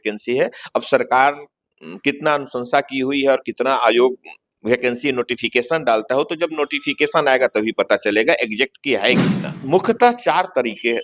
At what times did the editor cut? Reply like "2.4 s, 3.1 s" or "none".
9.5 s